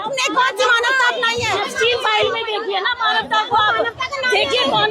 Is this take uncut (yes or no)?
no